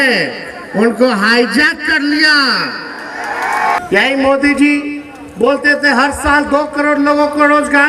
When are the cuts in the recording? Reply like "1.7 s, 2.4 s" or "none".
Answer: 3.8 s